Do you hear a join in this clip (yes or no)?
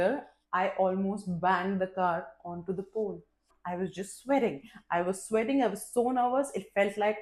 yes